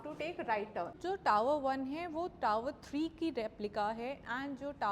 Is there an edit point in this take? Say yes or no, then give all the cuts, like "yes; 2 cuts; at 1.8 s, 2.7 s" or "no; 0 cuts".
yes; 1 cut; at 1.0 s